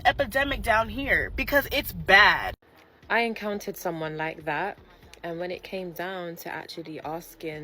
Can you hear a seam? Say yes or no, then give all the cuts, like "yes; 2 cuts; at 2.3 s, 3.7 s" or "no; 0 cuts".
yes; 1 cut; at 2.6 s